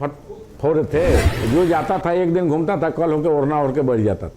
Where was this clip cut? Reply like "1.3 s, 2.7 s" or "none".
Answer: 1.3 s